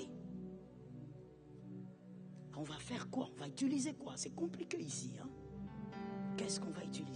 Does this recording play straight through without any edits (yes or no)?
yes